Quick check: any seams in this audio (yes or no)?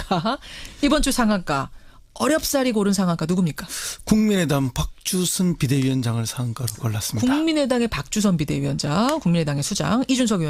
yes